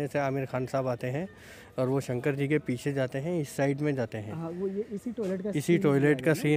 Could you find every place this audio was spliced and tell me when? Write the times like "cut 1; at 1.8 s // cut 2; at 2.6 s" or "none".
none